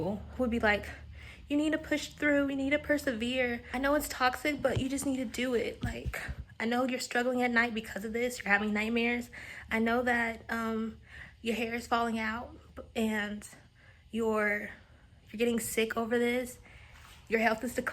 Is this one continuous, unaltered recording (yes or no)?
no